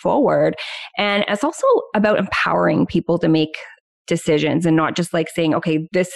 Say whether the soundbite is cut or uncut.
uncut